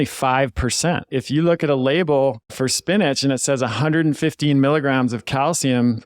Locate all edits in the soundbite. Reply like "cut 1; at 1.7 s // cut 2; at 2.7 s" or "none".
cut 1; at 1.1 s // cut 2; at 2.5 s